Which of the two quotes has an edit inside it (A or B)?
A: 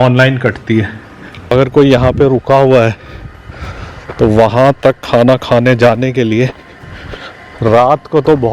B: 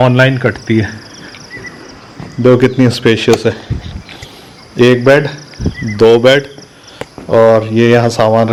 A